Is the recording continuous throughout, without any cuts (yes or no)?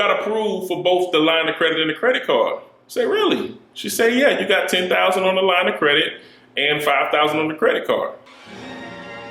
no